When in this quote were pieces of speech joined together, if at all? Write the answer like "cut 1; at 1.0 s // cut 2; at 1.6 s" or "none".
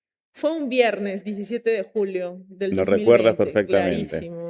none